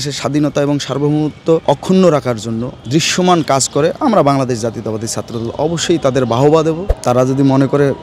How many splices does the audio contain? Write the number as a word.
three